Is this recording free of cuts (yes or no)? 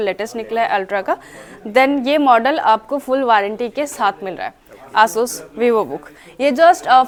yes